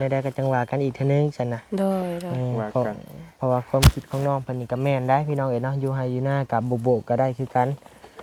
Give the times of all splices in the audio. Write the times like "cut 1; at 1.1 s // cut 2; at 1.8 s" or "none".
none

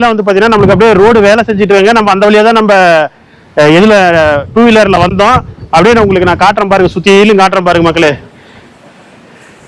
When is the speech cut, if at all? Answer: none

